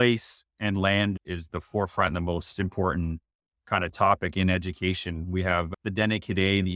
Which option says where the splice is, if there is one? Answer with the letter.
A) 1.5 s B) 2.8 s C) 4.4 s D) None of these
A